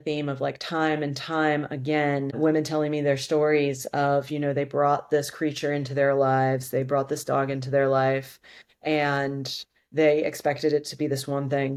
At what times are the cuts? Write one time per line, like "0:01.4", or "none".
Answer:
none